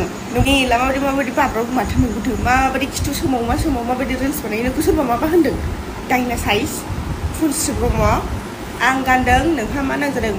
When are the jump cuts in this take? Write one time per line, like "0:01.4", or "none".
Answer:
none